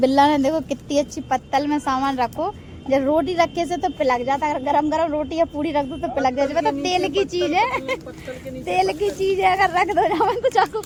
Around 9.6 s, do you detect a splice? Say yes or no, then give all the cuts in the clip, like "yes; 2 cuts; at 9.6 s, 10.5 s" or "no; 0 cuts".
no; 0 cuts